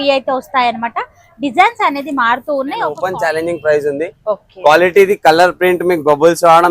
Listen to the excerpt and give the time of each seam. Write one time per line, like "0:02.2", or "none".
0:03.0